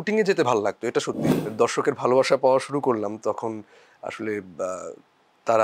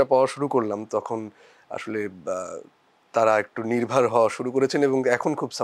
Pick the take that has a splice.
first; 1 cut; at 1.4 s

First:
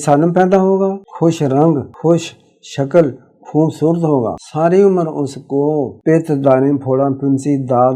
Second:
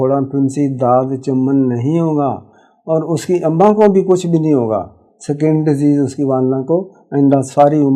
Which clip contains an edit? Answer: first; 4 cuts; at 1.1 s, 1.9 s, 4.4 s, 5.9 s

